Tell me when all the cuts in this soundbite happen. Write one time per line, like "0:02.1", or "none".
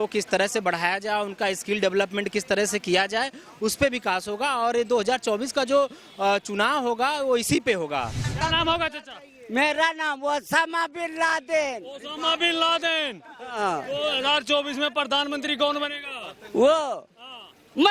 0:08.2